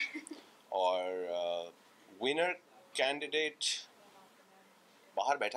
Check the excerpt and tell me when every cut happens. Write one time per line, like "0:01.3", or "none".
none